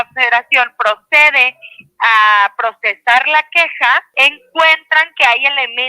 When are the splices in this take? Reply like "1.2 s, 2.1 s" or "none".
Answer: 4.1 s